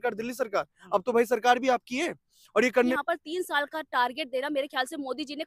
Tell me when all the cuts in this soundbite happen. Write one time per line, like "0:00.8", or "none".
0:02.9